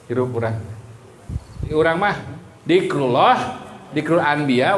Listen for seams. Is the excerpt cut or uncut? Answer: cut